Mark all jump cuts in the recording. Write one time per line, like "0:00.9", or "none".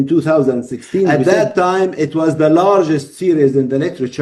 0:01.2